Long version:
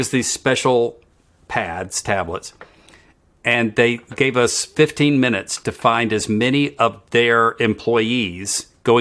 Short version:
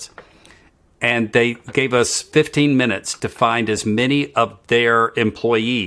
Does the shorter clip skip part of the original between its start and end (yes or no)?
no